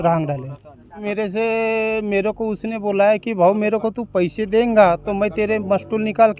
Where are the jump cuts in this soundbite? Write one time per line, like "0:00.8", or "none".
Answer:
0:01.0